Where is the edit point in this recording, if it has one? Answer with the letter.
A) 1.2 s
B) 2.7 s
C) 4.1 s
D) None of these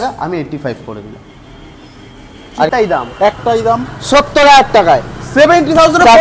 B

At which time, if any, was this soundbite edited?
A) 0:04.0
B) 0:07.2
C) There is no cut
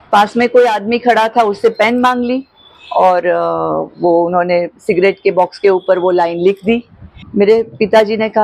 B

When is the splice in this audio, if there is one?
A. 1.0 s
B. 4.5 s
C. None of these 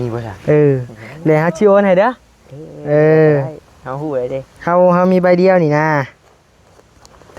C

